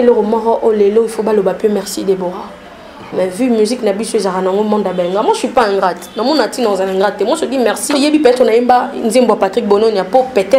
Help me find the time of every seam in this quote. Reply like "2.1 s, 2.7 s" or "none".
8.0 s

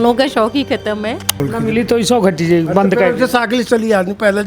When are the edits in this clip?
1.4 s

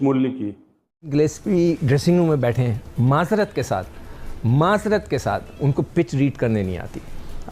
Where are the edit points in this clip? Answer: 1.1 s

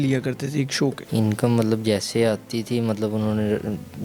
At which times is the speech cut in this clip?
1.0 s

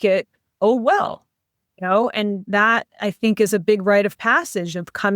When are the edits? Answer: none

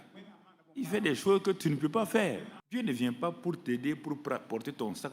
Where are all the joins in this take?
2.5 s

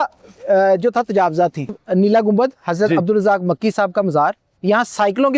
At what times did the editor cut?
1.7 s, 4.5 s

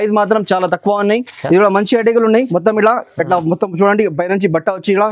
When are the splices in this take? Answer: 1.3 s

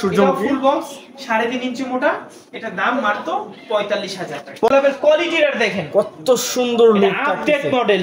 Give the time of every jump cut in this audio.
4.7 s

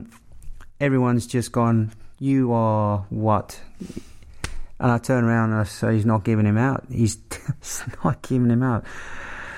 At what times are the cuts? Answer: none

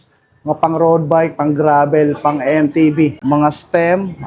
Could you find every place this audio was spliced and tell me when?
3.2 s

